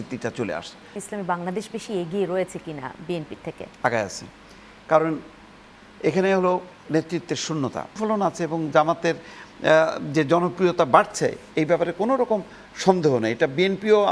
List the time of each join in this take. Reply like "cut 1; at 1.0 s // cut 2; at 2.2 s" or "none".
cut 1; at 1.0 s // cut 2; at 7.9 s